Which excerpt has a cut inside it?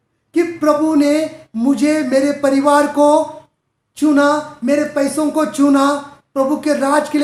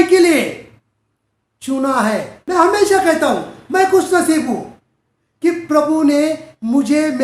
second; 1 cut; at 2.3 s

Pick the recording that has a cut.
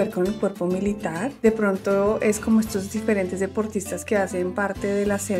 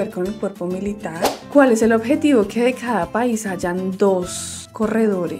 second; 1 cut; at 1.2 s

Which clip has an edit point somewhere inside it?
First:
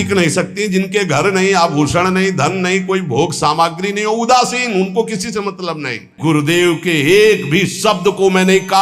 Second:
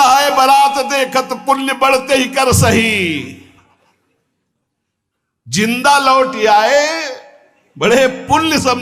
first; 1 cut; at 6.1 s

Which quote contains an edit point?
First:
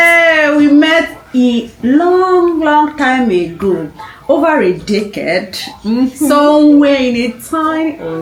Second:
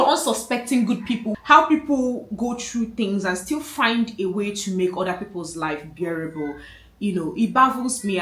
second; 1 cut; at 1.3 s

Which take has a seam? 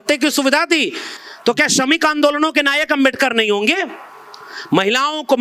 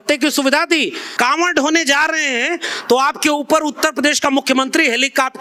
second; 1 cut; at 1.0 s

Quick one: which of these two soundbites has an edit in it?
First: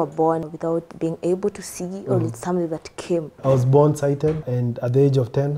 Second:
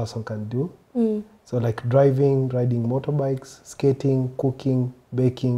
first; 3 cuts; at 0.7 s, 3.4 s, 4.5 s

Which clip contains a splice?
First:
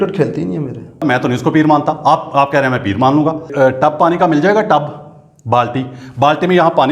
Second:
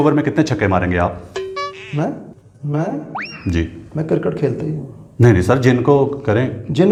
first; 2 cuts; at 1.0 s, 3.5 s

